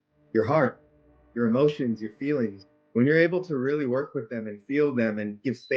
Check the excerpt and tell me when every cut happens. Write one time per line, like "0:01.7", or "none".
0:02.6